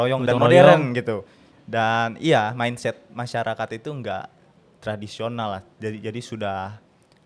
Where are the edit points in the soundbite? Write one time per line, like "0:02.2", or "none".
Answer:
none